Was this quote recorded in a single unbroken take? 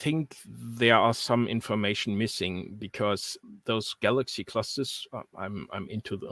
yes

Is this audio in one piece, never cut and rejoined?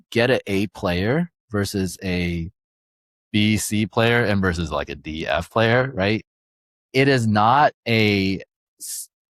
yes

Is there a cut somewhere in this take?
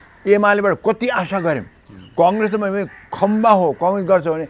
no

